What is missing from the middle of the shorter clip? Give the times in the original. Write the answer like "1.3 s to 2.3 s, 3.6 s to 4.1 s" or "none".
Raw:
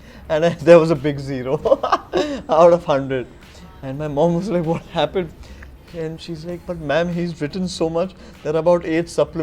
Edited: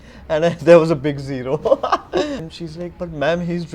2.4 s to 6.1 s